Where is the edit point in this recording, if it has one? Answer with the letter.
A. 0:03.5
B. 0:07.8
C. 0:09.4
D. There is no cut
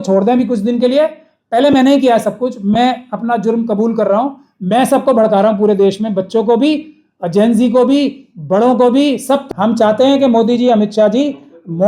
C